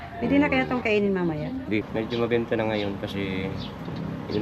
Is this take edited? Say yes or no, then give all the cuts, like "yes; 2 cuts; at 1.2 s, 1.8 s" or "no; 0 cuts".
yes; 1 cut; at 1.9 s